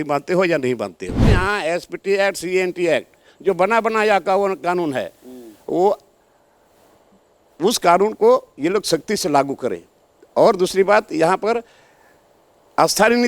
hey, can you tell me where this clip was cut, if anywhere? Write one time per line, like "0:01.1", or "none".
0:01.3